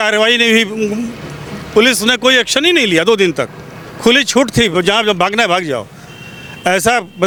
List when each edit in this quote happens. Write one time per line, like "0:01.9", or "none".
none